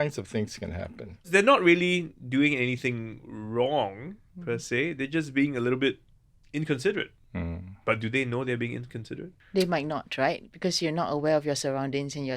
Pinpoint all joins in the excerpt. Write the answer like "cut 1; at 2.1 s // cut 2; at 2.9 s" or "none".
cut 1; at 1.3 s // cut 2; at 9.3 s